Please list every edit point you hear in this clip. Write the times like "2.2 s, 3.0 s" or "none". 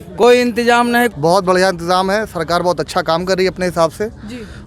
1.1 s